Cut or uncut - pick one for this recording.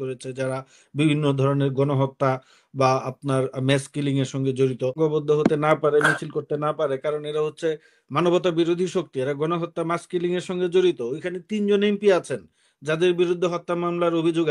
cut